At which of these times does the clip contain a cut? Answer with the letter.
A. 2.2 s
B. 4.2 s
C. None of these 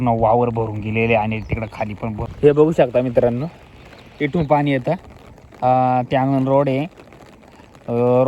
A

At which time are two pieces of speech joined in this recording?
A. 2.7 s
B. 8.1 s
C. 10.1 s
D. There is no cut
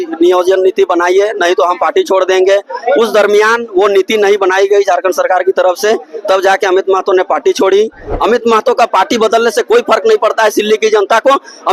B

